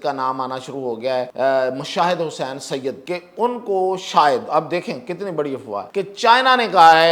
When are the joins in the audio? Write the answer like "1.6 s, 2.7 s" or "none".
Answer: 1.3 s, 3.0 s, 5.9 s

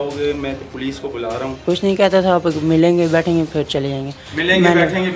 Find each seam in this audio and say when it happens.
1.6 s

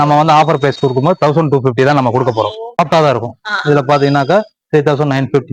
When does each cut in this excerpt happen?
2.6 s

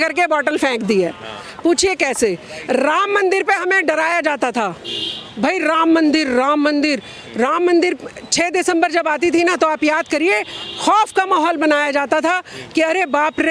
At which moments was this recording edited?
none

